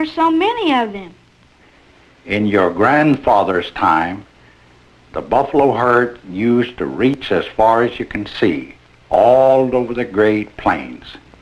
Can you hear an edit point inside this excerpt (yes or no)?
yes